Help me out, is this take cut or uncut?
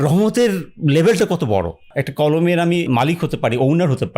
cut